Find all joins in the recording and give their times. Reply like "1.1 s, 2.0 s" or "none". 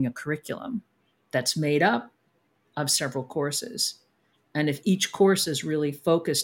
none